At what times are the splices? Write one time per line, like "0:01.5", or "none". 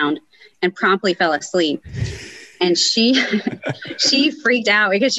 none